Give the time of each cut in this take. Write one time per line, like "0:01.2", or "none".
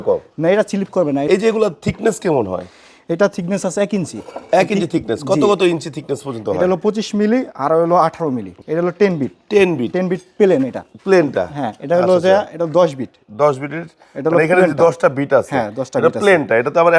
0:01.3
0:08.5